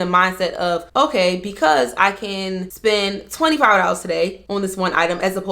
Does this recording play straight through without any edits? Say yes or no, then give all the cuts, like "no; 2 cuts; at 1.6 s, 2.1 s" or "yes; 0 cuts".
no; 3 cuts; at 0.9 s, 2.7 s, 4.4 s